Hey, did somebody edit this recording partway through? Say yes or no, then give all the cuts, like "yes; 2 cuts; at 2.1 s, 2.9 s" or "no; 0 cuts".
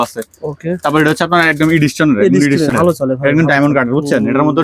yes; 1 cut; at 2.7 s